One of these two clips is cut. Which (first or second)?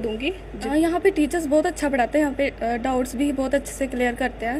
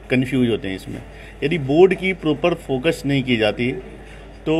first